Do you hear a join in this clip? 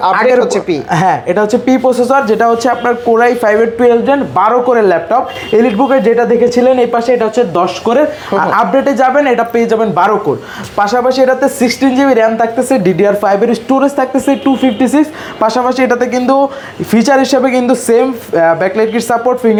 no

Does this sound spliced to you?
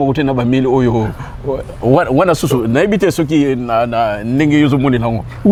no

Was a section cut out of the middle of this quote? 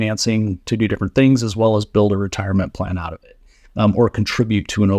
no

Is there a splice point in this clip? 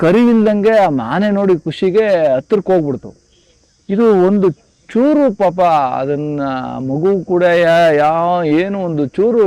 no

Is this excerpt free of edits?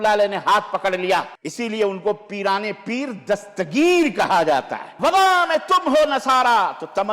no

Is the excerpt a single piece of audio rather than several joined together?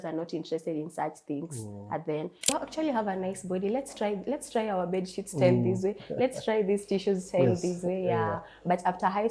no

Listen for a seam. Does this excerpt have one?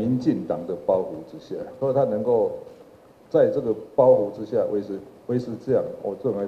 yes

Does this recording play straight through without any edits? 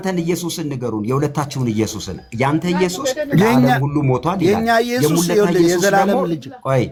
yes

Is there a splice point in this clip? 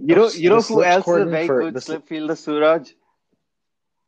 no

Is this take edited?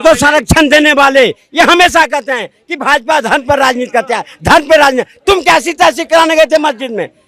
no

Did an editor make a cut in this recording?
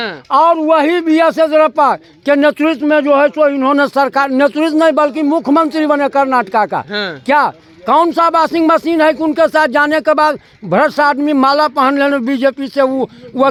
no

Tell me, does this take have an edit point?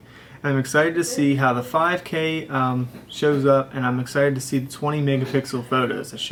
no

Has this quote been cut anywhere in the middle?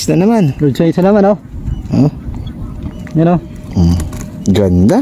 no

